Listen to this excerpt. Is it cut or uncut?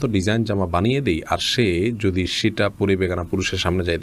uncut